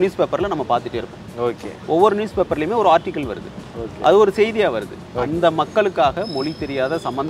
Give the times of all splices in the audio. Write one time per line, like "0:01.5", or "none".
0:05.0